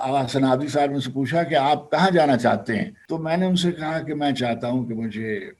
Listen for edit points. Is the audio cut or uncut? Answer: cut